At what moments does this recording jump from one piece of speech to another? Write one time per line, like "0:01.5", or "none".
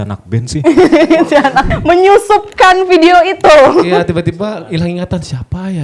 0:01.7